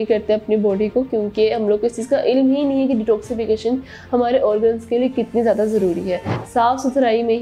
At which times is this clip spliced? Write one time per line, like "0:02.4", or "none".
0:06.3